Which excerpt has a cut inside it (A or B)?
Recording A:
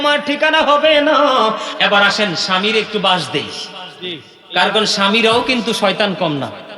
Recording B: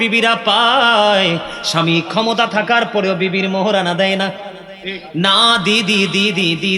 A